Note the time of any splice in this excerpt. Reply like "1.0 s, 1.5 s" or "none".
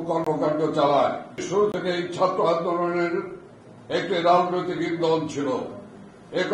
1.4 s